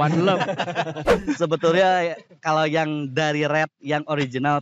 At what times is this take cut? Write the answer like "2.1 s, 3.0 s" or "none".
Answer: 1.1 s